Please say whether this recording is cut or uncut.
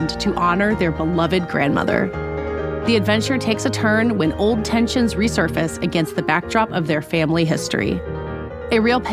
uncut